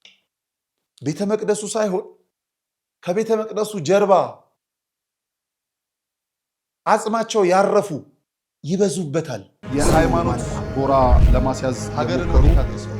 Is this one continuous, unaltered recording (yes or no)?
no